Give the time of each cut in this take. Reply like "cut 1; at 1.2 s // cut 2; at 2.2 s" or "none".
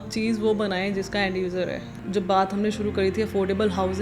cut 1; at 2.0 s